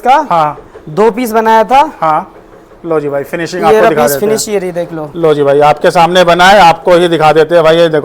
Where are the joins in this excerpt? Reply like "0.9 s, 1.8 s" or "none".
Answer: none